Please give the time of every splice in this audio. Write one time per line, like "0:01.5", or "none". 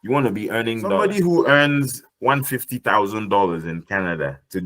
0:01.0